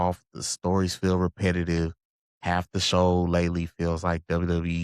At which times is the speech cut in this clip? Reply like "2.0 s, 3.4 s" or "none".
none

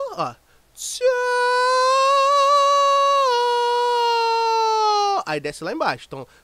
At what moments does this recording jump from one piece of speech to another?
none

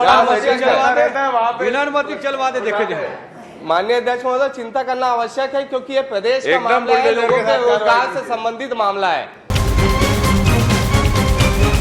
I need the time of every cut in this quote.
9.4 s

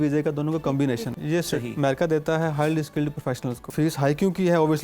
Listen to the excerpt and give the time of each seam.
1.1 s, 3.6 s

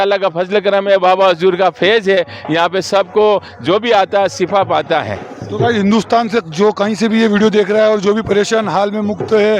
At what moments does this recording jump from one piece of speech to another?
none

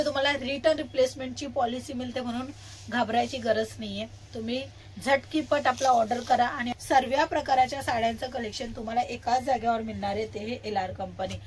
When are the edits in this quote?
6.7 s

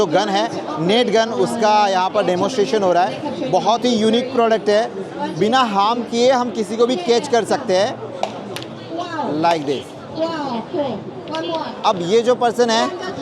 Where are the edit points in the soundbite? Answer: none

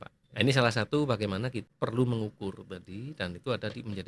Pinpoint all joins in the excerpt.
1.6 s

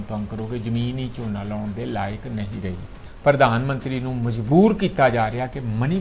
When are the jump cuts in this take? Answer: 3.0 s

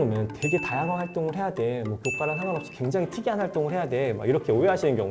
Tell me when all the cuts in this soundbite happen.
none

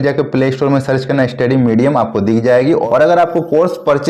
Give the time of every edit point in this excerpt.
2.8 s

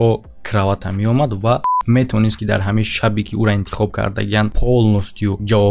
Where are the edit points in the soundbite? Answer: 1.7 s

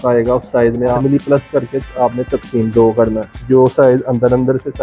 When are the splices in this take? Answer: 1.0 s, 3.3 s

